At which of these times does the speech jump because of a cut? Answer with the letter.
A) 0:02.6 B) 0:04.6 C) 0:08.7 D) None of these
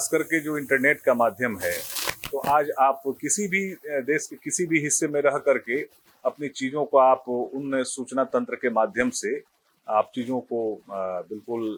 D